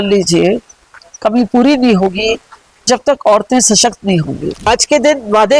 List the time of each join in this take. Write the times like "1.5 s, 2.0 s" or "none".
4.7 s